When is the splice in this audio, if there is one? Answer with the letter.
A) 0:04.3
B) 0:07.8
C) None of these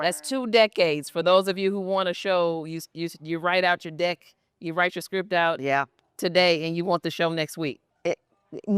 B